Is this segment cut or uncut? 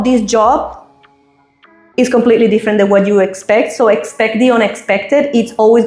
uncut